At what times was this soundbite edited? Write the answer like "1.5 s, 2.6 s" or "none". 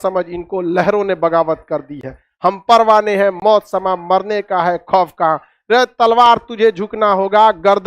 none